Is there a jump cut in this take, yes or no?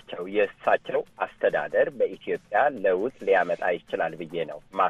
no